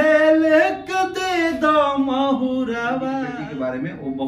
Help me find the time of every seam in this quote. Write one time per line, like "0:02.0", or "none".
0:03.3